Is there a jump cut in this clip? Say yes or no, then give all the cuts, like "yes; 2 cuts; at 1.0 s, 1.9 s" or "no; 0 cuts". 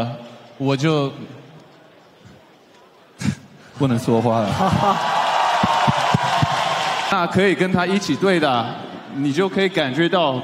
yes; 1 cut; at 7.1 s